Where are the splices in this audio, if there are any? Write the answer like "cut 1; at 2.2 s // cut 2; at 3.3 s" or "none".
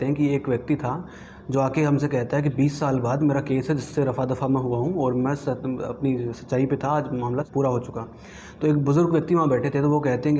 cut 1; at 7.5 s